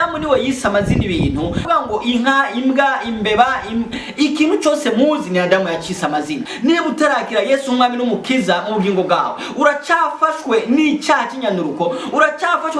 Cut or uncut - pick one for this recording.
cut